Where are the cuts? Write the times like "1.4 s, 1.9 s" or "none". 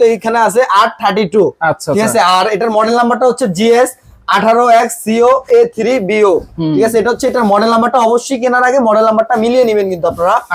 none

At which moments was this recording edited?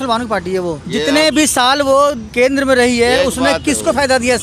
0.8 s, 2.2 s

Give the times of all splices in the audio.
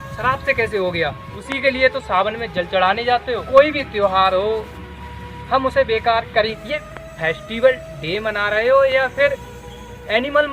1.3 s, 3.4 s, 6.6 s

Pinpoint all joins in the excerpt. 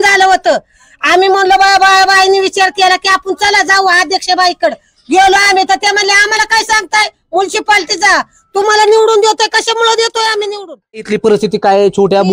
11.0 s

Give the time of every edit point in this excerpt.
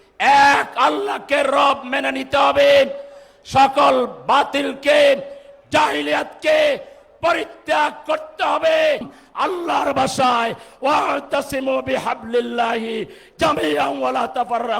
9.2 s

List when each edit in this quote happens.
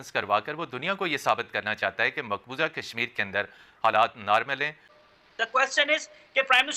4.9 s

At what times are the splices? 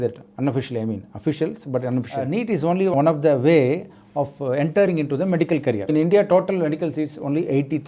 2.1 s, 5.8 s

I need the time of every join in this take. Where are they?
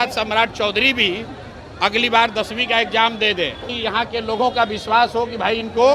3.7 s

